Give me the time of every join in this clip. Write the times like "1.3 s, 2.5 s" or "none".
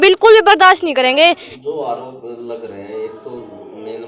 1.5 s